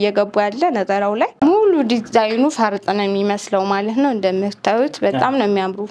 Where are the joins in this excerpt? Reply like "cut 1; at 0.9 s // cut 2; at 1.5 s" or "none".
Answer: cut 1; at 1.4 s